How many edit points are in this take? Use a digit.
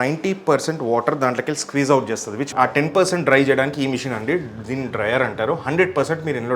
1